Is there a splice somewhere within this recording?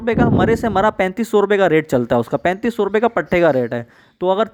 no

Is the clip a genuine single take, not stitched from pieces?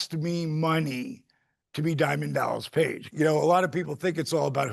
no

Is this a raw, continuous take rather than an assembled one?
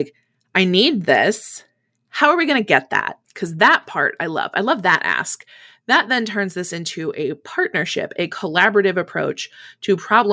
yes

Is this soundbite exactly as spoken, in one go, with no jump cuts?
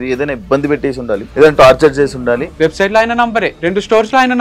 no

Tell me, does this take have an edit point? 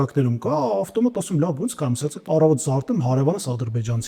no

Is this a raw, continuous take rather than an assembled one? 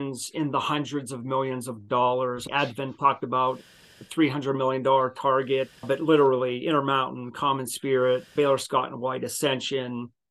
no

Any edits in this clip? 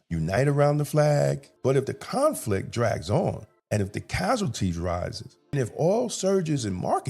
yes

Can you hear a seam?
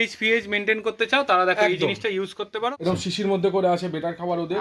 yes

